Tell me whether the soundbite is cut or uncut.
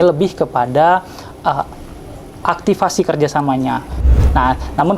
cut